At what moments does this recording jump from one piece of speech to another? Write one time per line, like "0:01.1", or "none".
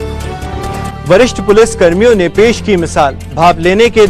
none